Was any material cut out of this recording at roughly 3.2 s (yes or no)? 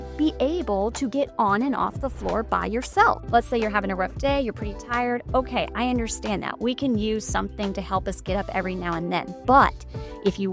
no